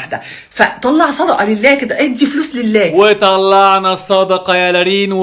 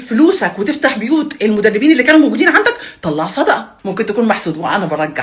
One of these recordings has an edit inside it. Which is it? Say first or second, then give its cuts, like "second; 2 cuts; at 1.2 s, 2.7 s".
second; 1 cut; at 3.7 s